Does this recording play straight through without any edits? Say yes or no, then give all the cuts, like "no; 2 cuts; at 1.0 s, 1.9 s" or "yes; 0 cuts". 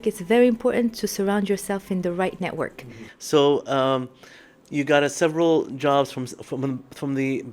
yes; 0 cuts